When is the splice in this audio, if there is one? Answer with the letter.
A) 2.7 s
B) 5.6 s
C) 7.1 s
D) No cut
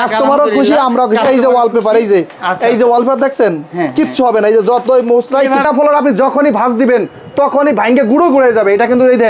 B